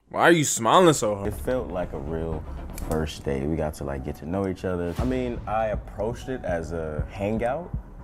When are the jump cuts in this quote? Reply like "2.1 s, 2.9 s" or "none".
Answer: 1.2 s

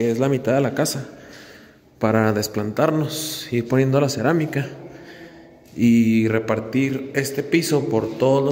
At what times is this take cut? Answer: none

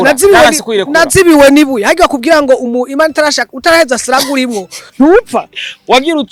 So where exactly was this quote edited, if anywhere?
none

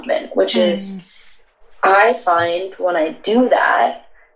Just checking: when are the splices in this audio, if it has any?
none

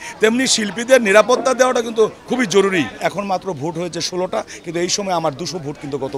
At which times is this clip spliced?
2.9 s

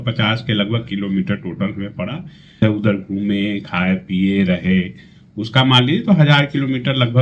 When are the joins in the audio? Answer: 2.6 s

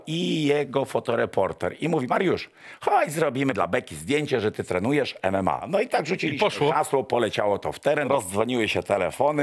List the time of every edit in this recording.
3.5 s, 5.7 s, 8.1 s

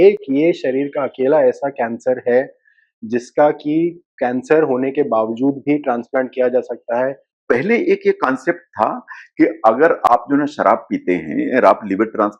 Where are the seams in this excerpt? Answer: 7.3 s

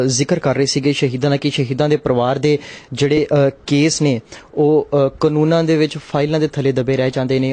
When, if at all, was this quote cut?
2.7 s

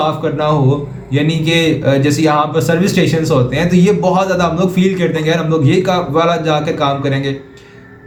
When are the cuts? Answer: none

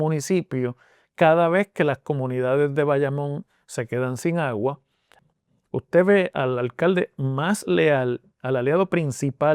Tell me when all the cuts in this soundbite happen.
5.2 s

